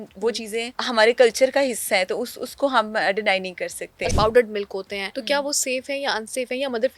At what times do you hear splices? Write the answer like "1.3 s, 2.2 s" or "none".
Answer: 0.8 s, 4.1 s, 5.0 s